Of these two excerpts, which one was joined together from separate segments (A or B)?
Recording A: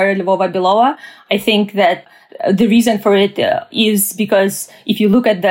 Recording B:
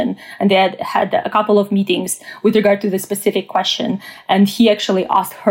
A